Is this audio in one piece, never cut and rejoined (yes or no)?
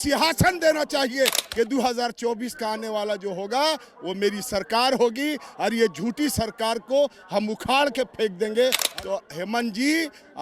no